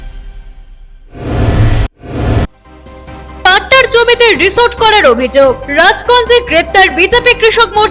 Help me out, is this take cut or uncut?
uncut